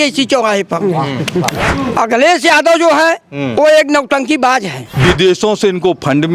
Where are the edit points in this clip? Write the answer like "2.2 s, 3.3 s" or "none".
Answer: 1.7 s, 4.8 s